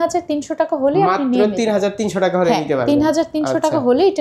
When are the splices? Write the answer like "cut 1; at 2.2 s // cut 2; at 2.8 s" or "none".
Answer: none